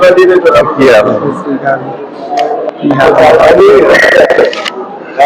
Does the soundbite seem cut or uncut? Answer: uncut